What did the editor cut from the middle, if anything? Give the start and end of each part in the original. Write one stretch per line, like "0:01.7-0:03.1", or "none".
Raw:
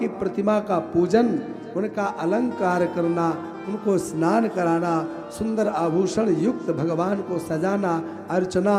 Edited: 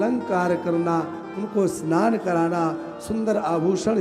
none